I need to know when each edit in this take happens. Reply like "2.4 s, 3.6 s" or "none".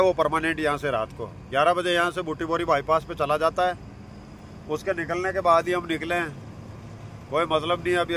none